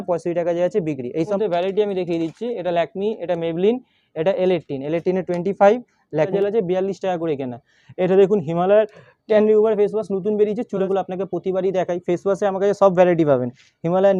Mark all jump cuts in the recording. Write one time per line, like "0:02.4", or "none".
0:01.3
0:06.3
0:10.8